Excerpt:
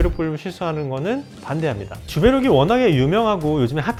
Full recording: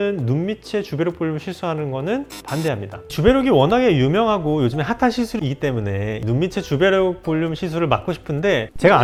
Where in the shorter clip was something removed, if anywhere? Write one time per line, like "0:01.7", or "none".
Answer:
none